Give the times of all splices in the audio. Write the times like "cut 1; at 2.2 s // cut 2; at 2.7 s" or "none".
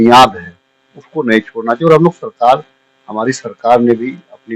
none